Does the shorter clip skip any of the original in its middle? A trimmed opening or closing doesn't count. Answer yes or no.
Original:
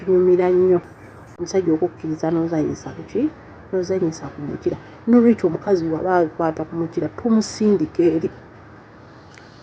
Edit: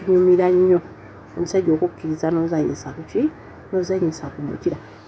no